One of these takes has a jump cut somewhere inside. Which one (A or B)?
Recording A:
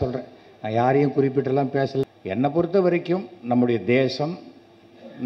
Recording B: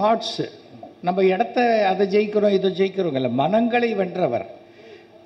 A